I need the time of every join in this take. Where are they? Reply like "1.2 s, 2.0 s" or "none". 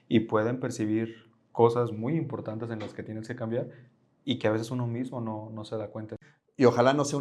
6.2 s